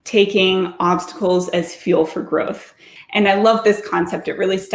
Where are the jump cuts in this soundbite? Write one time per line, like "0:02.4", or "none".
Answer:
0:03.0